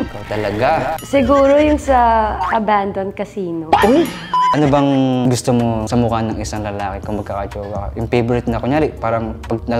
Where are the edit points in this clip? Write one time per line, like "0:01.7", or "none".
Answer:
0:04.3